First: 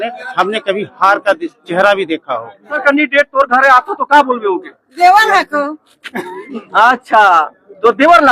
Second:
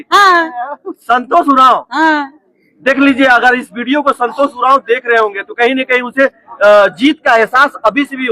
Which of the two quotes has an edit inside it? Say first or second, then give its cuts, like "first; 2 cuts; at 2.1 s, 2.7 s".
first; 1 cut; at 2.8 s